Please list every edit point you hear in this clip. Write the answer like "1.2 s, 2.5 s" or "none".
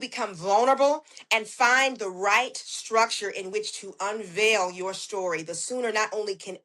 none